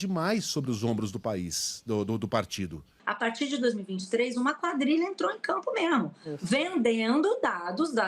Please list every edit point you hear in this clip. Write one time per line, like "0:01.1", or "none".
0:03.0